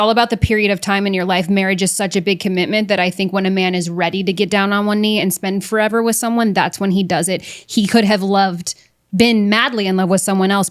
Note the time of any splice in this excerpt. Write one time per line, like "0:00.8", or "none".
none